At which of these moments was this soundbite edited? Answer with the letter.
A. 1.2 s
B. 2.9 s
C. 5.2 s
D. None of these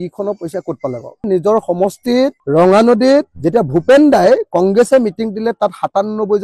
A